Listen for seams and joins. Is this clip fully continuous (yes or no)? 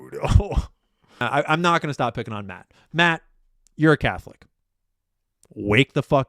no